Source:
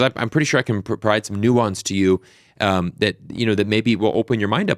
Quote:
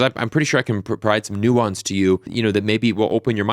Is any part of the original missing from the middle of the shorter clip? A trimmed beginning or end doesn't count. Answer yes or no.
yes